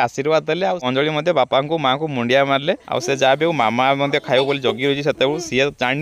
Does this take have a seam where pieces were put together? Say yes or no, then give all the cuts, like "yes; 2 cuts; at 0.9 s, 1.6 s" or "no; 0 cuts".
yes; 2 cuts; at 0.9 s, 2.8 s